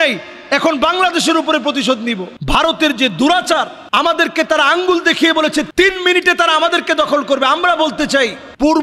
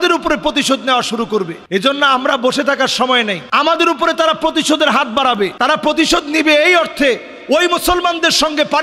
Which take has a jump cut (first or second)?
first